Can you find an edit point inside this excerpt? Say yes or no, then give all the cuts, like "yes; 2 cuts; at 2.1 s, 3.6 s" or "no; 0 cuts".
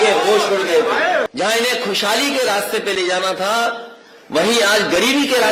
yes; 1 cut; at 1.3 s